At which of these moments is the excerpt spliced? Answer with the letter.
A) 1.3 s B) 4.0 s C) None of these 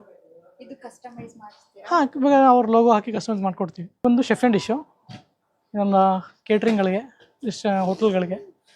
B